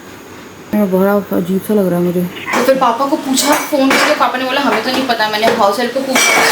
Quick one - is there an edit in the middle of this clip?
yes; 2 cuts; at 0.7 s, 2.5 s

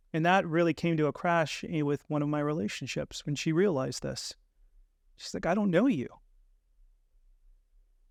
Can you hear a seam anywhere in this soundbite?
no; 0 cuts

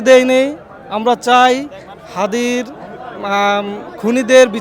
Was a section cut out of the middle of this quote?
no; 0 cuts

